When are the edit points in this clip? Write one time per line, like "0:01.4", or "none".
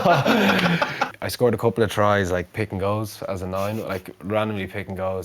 0:01.1